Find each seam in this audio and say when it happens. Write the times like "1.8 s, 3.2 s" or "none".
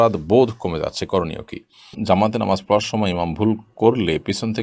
2.0 s